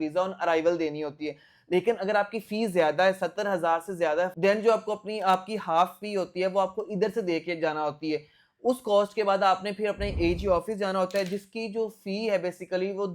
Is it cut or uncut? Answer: uncut